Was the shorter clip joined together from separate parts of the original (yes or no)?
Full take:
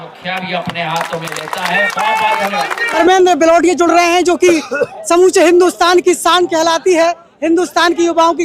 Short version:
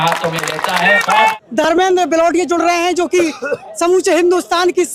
yes